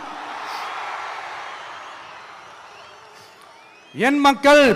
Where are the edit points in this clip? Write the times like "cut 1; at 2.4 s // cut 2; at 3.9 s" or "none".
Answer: none

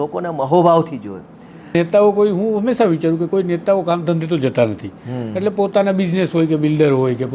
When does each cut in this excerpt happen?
cut 1; at 1.7 s

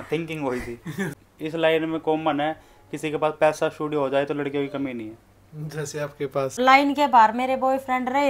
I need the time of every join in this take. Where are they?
cut 1; at 1.2 s // cut 2; at 6.6 s

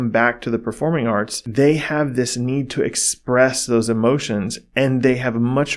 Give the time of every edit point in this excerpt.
cut 1; at 1.4 s

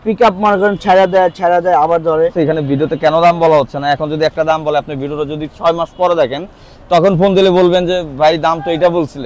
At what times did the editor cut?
cut 1; at 2.3 s

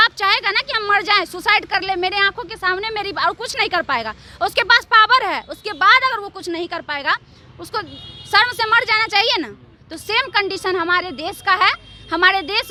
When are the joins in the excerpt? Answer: none

